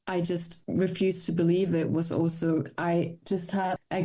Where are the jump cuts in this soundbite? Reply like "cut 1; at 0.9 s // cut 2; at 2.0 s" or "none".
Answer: none